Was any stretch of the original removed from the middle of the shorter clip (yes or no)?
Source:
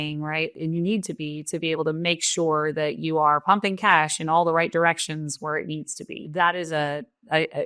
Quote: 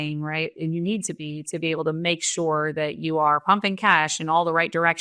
no